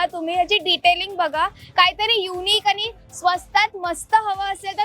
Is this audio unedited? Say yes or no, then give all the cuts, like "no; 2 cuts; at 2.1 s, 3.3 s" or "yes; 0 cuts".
yes; 0 cuts